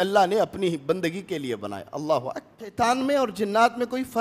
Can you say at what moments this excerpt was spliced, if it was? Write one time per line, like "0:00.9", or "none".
0:02.7